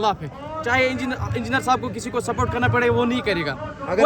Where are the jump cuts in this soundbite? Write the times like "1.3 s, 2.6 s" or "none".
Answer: none

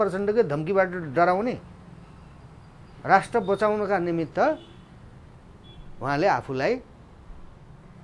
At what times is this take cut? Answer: none

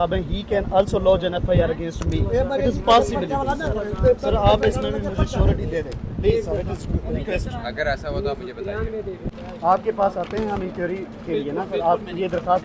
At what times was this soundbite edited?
9.4 s

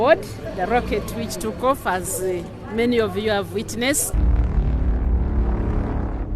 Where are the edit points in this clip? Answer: 4.1 s

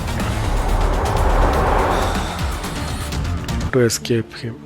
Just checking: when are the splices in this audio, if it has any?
3.7 s

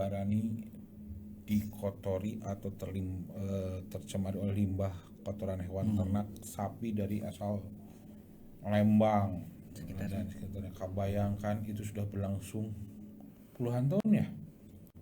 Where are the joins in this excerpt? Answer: 9.7 s

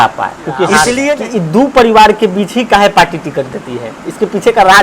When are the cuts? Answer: 1.0 s

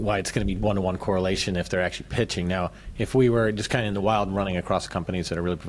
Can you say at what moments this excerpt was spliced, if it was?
none

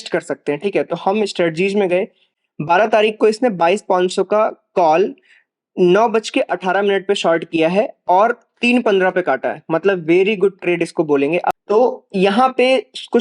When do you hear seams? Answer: 2.3 s, 11.6 s

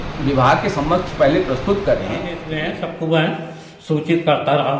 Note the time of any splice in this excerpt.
2.5 s

